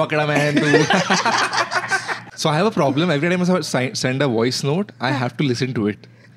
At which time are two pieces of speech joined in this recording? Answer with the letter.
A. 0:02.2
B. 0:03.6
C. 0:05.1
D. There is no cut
A